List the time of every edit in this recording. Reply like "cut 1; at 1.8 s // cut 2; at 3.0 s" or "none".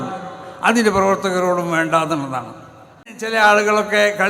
cut 1; at 3.2 s